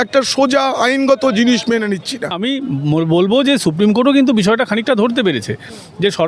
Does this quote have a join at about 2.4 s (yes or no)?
yes